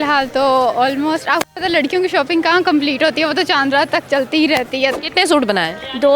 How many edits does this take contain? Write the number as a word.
one